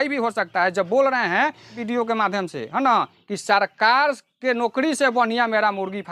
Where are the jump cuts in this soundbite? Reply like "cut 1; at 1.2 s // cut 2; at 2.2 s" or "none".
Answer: cut 1; at 1.8 s